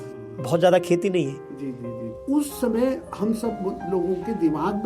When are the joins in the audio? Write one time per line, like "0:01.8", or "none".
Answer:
0:02.1